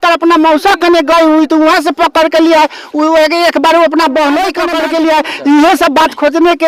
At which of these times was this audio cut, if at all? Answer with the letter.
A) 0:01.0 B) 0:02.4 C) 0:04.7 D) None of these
C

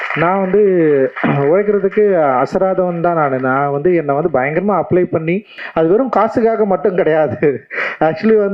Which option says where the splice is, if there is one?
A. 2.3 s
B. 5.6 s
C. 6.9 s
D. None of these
B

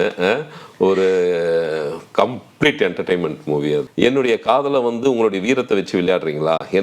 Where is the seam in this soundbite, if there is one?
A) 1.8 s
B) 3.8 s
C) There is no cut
B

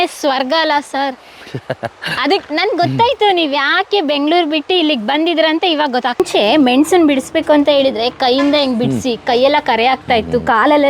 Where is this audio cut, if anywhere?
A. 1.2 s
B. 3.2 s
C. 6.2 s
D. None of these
C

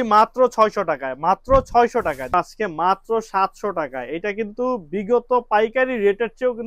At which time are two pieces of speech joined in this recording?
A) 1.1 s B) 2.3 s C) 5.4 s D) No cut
B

